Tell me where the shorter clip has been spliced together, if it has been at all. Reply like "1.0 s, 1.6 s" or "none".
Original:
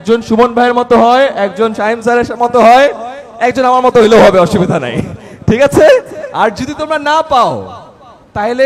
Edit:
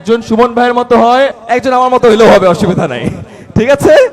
1.4 s